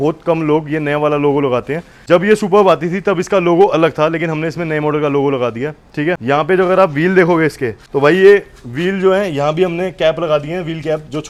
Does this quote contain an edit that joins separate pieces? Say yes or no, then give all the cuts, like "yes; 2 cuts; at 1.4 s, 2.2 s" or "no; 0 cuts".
no; 0 cuts